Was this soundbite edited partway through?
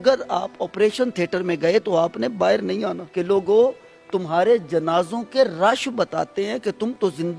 yes; 1 cut; at 3.0 s

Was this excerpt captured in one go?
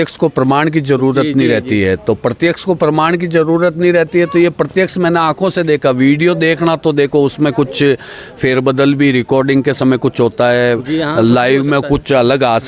yes; 0 cuts

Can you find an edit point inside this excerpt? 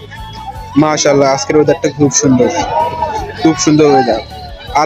no; 0 cuts

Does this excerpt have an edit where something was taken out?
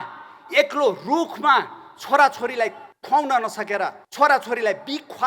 yes; 2 cuts; at 2.9 s, 4.0 s

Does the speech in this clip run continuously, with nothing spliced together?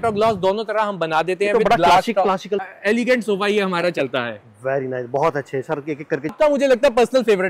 no; 2 cuts; at 2.6 s, 6.3 s

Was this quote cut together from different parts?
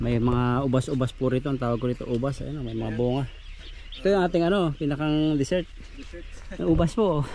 no; 0 cuts

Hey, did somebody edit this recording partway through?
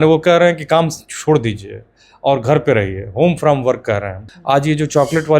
yes; 1 cut; at 4.1 s

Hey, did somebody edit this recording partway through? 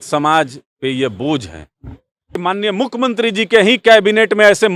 yes; 1 cut; at 2.3 s

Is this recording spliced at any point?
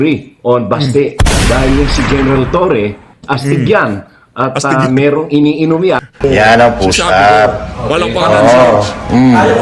yes; 1 cut; at 6.4 s

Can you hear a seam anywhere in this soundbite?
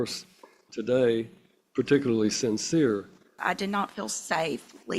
yes; 1 cut; at 3.3 s

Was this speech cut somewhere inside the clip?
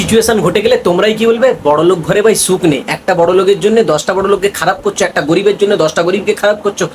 no; 0 cuts

